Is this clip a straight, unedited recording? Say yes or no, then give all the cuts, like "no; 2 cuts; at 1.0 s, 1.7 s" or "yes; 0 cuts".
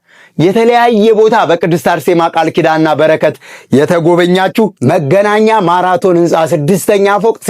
no; 1 cut; at 4.8 s